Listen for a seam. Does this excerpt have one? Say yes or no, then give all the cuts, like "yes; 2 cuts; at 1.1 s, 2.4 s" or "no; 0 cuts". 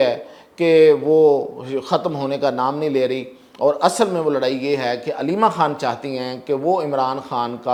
no; 0 cuts